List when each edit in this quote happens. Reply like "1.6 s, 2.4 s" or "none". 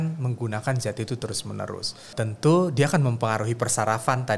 2.1 s